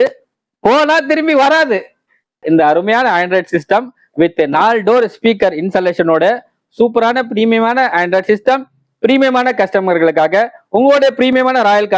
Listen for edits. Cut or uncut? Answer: cut